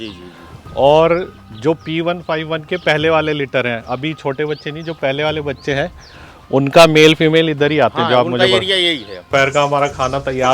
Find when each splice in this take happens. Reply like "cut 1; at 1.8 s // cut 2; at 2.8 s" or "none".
cut 1; at 9.3 s